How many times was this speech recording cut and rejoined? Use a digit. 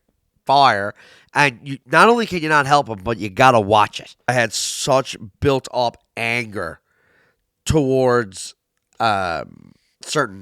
1